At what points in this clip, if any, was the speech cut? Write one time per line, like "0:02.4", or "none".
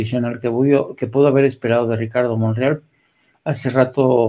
none